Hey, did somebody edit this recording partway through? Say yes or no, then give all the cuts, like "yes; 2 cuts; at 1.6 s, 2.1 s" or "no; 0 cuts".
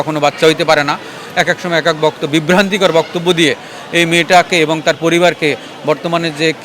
no; 0 cuts